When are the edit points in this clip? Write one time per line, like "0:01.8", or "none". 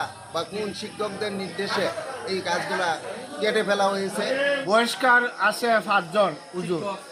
0:04.6